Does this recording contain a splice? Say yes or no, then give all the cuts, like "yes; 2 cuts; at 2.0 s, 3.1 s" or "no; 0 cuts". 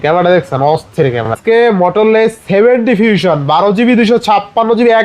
yes; 1 cut; at 1.3 s